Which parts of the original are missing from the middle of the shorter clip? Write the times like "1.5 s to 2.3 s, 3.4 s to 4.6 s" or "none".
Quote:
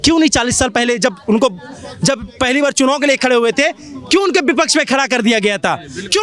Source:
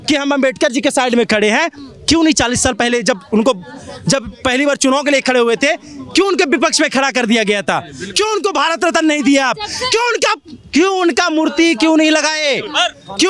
none